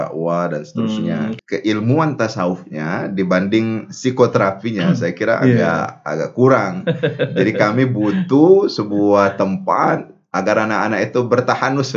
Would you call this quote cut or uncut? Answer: cut